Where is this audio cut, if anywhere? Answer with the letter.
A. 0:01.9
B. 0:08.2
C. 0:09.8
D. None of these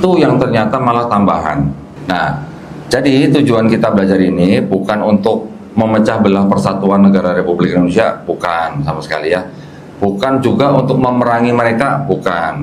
A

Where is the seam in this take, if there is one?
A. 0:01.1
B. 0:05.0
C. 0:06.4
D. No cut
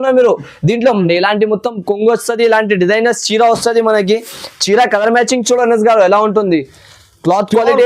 A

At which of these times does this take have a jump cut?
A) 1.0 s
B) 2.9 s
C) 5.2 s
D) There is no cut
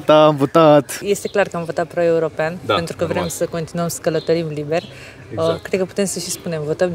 A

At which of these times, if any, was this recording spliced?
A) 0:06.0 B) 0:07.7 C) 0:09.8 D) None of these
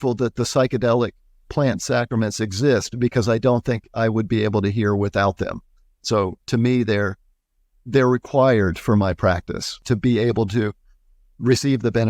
C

